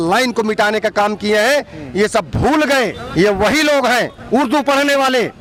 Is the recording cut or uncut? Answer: uncut